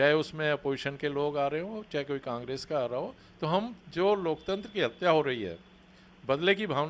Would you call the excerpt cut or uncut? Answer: uncut